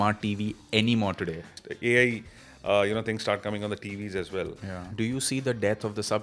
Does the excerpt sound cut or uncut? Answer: cut